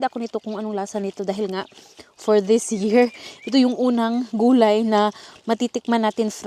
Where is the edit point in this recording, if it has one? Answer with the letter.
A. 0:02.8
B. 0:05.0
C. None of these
C